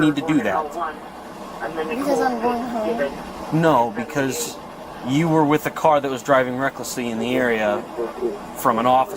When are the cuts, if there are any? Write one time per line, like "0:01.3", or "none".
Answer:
none